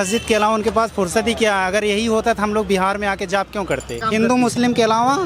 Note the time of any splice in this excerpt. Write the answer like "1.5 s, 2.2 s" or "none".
3.9 s